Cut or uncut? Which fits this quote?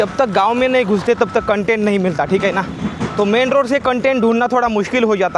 uncut